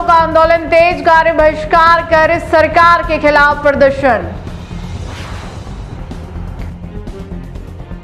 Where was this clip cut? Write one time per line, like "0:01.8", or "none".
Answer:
none

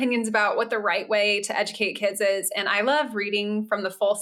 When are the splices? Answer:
none

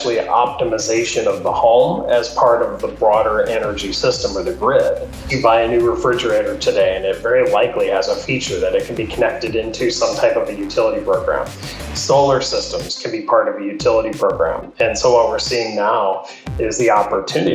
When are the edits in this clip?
0:05.3

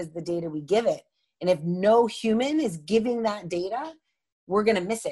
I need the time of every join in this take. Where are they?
none

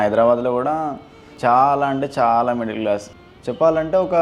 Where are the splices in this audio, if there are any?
0:01.2
0:03.2

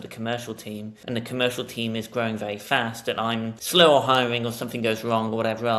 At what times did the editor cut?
0:00.9
0:03.6

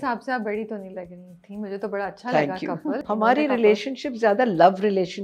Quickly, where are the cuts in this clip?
0:03.0

